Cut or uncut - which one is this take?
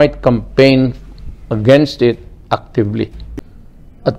cut